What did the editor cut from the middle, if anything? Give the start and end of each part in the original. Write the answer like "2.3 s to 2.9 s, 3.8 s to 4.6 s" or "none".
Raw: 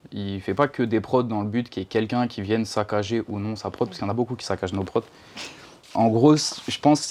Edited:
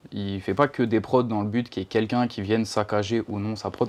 none